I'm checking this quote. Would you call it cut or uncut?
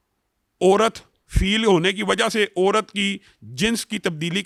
uncut